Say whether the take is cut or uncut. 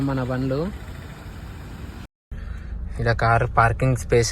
cut